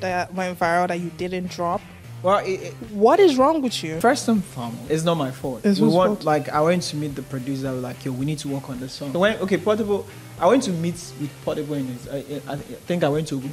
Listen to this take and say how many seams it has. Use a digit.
4